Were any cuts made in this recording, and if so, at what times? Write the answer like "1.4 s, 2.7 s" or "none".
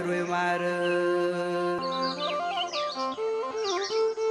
1.8 s